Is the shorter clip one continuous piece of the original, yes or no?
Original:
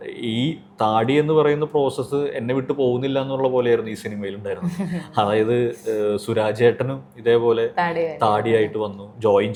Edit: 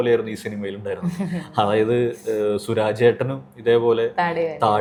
yes